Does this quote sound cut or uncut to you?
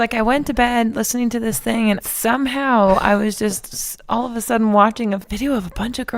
cut